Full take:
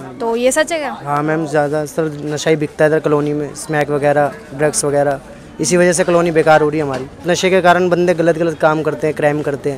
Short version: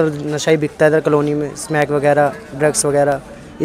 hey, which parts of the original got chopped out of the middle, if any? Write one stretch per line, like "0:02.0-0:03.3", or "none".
none